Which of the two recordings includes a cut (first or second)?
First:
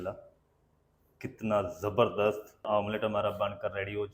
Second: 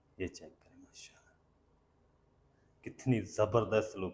first